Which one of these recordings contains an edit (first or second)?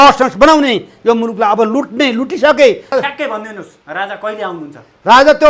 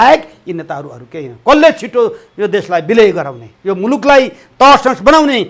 first